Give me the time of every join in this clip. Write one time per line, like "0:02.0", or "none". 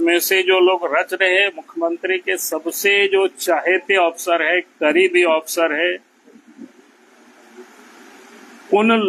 none